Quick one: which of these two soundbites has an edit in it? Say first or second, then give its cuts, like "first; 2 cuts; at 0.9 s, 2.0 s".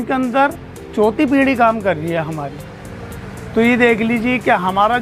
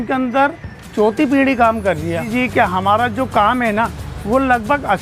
second; 1 cut; at 2.3 s